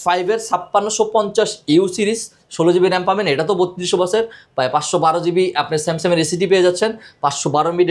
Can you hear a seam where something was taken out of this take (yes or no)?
no